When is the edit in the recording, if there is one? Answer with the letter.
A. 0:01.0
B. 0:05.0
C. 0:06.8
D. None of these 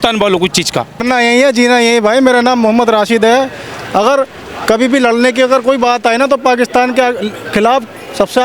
A